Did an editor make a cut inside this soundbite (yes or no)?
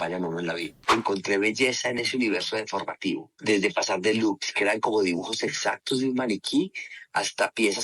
yes